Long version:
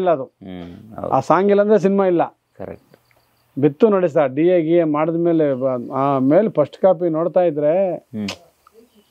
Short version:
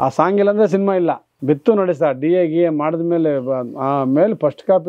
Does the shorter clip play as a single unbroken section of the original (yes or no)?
no